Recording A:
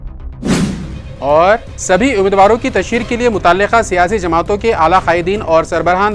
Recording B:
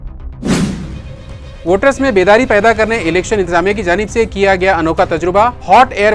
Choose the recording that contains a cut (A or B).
B